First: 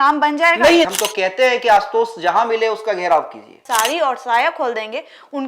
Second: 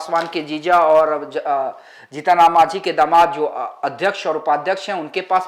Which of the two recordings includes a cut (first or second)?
first